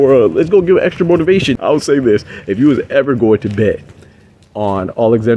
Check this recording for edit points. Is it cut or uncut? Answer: cut